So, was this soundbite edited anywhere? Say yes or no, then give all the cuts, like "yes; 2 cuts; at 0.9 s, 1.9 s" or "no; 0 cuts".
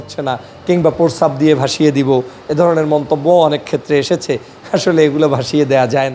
no; 0 cuts